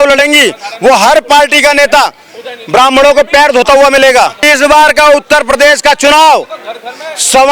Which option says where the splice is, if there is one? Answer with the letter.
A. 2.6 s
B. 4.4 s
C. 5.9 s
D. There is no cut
B